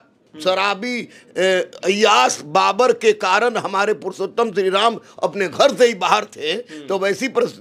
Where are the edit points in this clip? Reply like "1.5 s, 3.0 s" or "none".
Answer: none

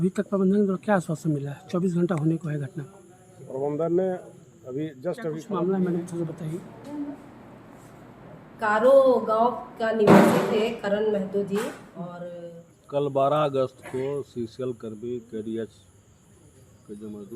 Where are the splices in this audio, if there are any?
5.4 s, 12.2 s

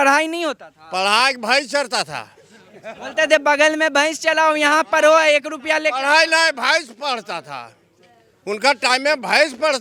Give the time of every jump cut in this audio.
none

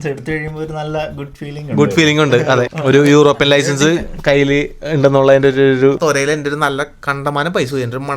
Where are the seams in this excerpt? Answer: 2.7 s, 6.0 s

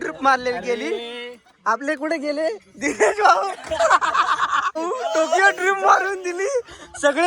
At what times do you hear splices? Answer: 4.8 s

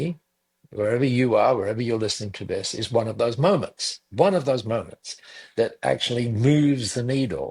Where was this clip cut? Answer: none

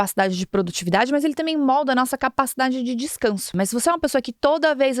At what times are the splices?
3.5 s

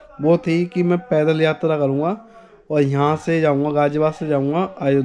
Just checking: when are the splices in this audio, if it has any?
none

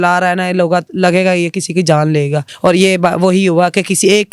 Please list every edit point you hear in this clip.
2.5 s

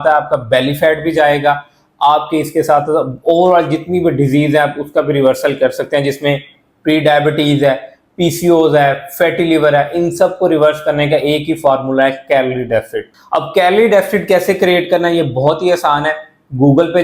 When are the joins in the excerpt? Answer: none

